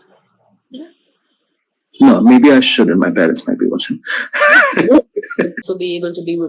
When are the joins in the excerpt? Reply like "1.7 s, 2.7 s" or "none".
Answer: 5.6 s

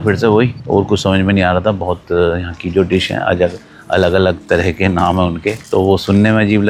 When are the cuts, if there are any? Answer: none

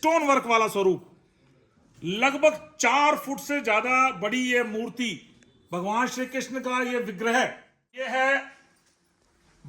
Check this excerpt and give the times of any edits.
8.0 s

